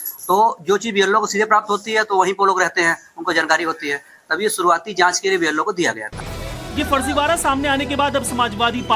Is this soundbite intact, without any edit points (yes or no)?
no